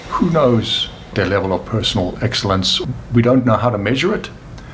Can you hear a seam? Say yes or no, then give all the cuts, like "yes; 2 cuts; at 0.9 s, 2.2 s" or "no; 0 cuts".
yes; 2 cuts; at 1.1 s, 2.8 s